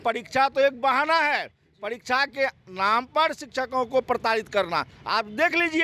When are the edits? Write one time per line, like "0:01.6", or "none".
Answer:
none